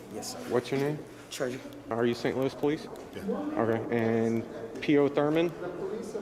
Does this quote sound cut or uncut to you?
cut